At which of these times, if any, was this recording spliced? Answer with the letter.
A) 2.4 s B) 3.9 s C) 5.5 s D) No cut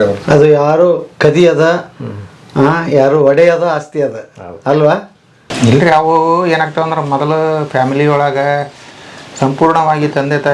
C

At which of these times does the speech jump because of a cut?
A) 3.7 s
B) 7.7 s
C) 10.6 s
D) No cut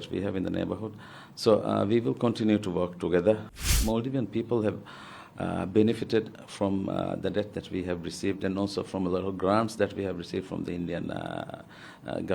A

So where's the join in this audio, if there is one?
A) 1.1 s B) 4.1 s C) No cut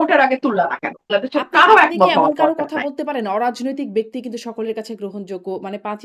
A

